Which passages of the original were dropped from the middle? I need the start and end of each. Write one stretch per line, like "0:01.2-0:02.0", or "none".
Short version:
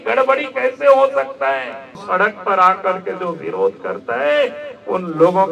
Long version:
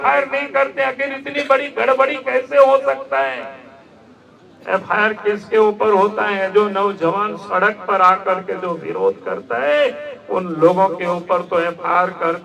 0:03.7-0:07.4